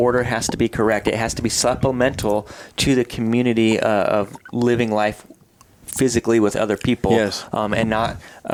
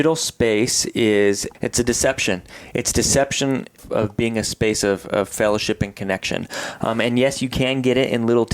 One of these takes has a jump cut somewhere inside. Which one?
second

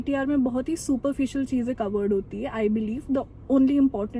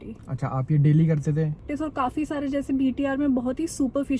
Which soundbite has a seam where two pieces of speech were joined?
second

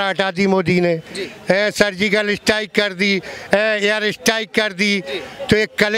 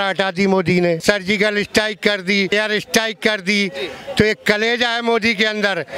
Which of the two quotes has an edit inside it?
second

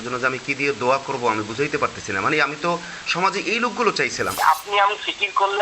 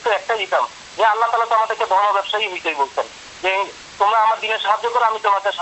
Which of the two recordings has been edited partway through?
first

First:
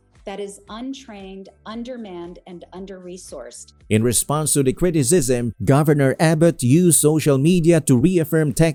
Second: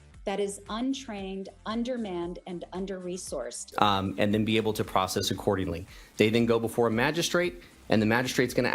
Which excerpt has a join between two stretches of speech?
second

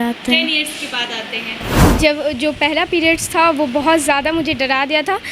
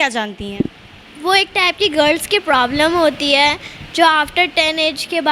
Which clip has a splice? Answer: first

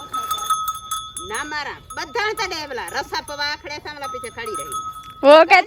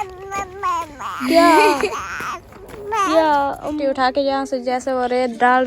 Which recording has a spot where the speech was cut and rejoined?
second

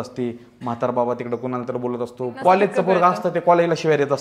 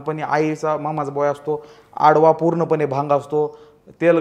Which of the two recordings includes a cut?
first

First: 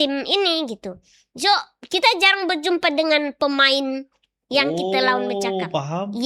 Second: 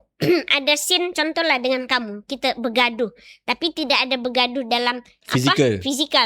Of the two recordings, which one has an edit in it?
second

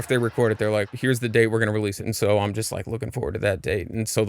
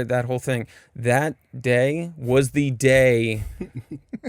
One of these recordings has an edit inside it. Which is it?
first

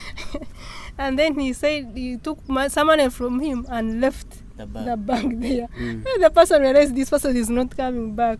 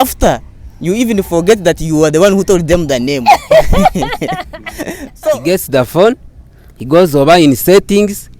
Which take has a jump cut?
second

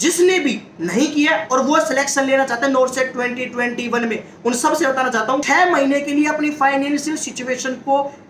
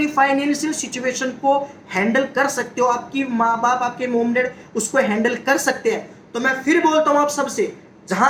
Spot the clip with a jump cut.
first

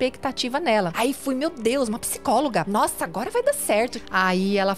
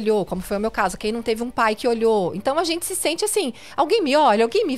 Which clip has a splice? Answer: first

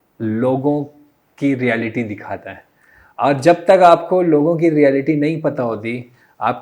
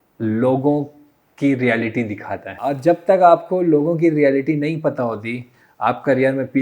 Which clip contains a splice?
second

